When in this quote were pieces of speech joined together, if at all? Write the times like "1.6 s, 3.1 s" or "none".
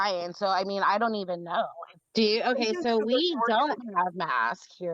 1.9 s